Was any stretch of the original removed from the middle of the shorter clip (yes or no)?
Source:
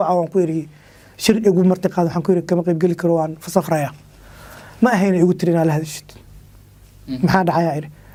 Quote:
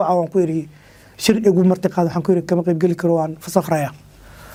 no